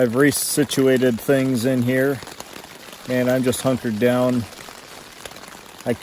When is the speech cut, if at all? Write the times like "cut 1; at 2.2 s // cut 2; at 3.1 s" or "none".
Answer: none